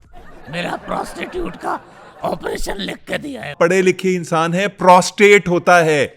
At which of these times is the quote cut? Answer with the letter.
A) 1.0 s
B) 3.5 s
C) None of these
B